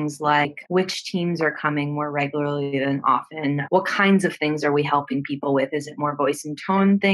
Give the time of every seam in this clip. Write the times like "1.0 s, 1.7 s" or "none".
1.0 s